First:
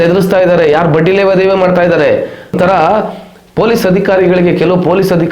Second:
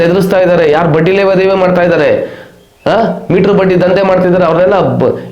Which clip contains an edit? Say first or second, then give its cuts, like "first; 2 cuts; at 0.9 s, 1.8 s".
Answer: first; 1 cut; at 2.5 s